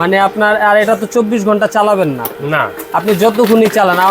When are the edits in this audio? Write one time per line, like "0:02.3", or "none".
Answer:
none